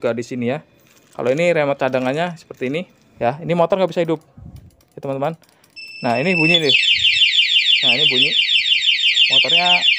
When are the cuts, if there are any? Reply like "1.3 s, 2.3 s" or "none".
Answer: 3.0 s